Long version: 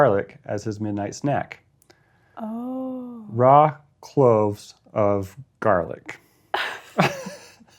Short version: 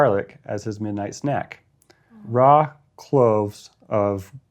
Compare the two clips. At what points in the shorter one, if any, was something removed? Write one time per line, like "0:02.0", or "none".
0:02.1